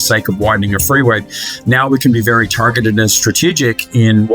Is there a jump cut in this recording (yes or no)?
yes